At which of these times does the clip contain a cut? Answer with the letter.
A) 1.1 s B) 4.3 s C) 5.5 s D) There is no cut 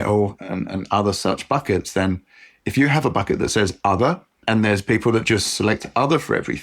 B